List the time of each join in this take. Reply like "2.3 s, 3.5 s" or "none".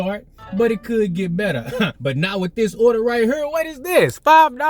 2.0 s